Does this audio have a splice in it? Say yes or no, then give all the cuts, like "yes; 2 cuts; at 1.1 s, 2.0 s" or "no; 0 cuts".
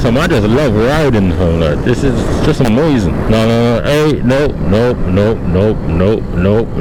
no; 0 cuts